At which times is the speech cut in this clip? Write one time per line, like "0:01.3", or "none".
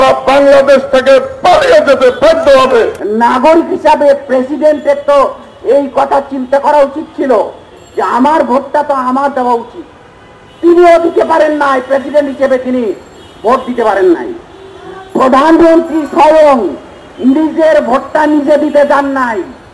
0:03.0